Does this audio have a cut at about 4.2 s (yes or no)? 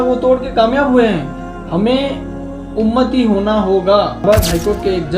yes